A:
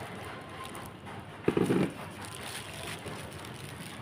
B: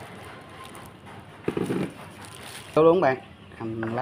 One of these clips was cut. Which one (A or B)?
B